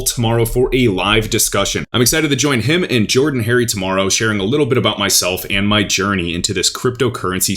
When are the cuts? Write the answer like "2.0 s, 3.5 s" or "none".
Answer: 1.9 s